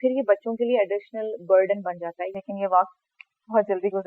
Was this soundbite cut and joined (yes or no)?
yes